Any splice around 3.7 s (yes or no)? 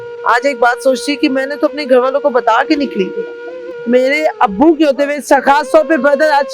yes